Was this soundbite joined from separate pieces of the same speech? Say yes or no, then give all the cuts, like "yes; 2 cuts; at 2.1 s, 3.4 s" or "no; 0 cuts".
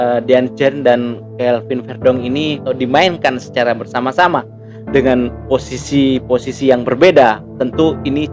yes; 1 cut; at 2.7 s